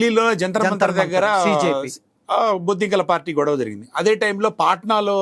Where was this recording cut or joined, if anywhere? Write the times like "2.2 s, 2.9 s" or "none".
none